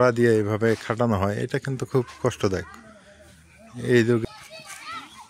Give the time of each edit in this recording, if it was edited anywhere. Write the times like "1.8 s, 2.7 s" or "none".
4.2 s